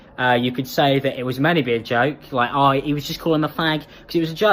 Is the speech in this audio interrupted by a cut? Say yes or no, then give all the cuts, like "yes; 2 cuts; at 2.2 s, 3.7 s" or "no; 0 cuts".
yes; 1 cut; at 1.3 s